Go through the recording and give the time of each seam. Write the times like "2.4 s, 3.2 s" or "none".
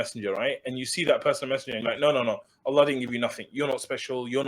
none

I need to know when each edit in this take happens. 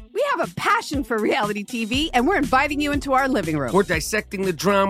3.9 s

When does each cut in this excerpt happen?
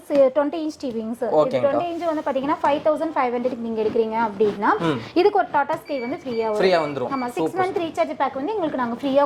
none

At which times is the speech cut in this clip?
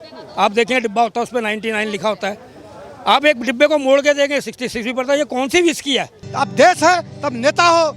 6.2 s

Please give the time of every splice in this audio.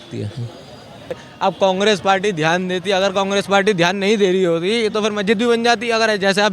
1.2 s

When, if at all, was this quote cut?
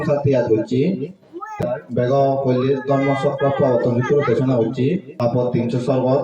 1.6 s, 5.1 s

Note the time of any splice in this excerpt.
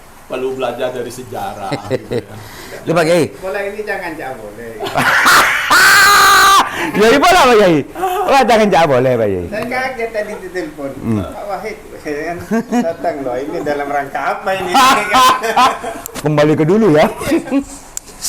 none

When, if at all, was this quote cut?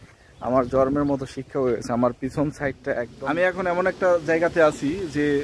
3.1 s

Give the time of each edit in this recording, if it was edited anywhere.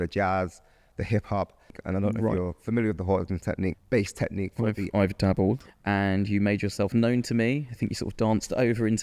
1.8 s, 3.8 s, 5.6 s

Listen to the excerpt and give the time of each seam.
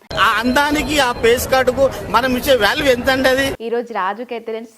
3.6 s

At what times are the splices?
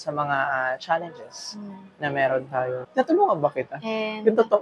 2.8 s

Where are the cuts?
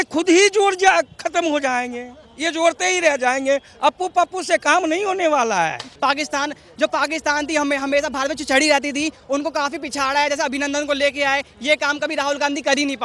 5.9 s

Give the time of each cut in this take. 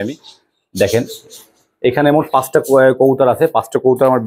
none

